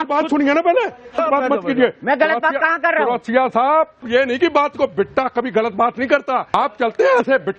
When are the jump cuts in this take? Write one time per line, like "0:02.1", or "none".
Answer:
0:01.2
0:04.0
0:06.5